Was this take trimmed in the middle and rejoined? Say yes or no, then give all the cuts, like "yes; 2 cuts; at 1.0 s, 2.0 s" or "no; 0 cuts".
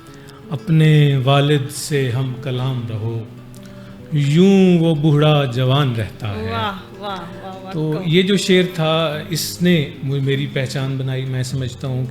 no; 0 cuts